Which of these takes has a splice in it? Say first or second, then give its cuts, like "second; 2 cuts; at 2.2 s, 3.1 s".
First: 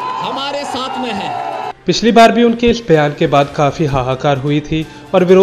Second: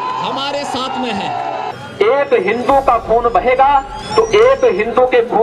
second; 1 cut; at 1.7 s